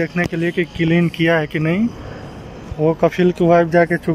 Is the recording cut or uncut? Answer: uncut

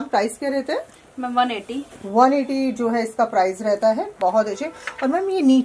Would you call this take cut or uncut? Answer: uncut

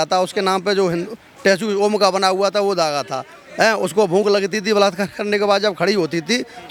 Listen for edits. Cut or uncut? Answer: uncut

